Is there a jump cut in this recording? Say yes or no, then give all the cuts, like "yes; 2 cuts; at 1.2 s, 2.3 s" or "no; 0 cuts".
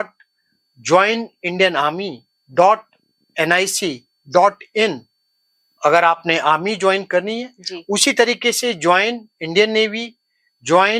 no; 0 cuts